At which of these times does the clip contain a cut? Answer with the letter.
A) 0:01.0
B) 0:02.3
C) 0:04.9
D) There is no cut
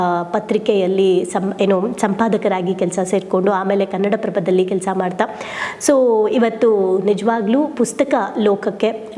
D